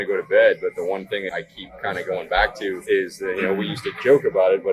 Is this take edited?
yes; 1 cut; at 1.3 s

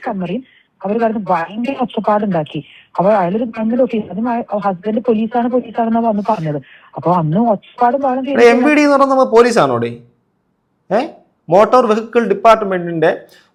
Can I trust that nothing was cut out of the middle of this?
yes; 0 cuts

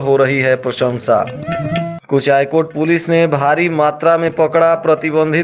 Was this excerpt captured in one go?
yes; 0 cuts

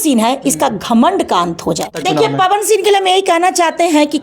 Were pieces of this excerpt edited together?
yes; 1 cut; at 2.0 s

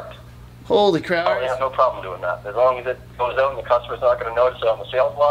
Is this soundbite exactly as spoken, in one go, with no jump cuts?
no; 1 cut; at 1.1 s

